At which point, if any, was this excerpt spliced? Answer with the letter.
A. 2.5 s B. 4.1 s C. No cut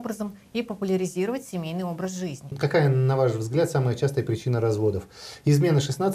A